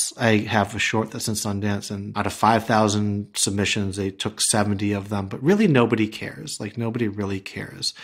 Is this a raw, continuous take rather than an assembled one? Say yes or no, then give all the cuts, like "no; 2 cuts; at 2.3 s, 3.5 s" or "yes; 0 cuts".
no; 1 cut; at 2.1 s